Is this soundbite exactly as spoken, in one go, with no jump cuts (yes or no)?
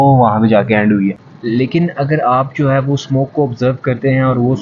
no